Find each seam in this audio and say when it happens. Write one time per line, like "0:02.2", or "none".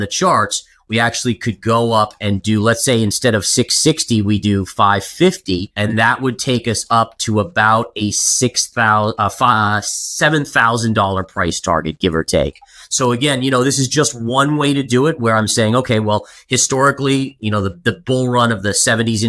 0:05.7